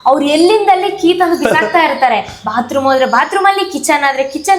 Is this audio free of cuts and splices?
yes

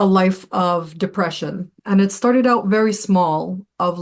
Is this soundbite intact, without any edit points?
yes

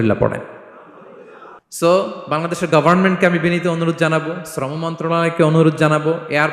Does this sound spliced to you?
yes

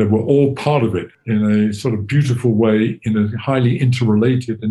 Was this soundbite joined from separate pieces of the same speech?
yes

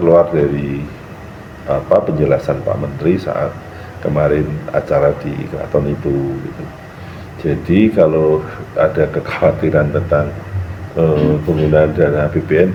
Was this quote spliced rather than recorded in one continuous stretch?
no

